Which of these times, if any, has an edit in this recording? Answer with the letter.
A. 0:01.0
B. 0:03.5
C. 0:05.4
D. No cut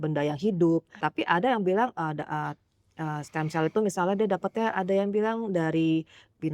A